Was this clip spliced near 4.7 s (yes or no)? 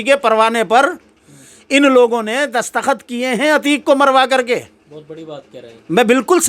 no